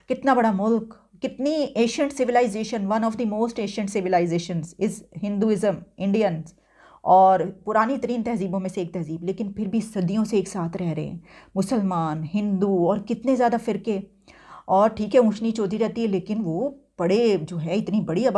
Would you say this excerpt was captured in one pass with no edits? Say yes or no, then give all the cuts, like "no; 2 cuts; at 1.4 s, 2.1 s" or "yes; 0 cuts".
yes; 0 cuts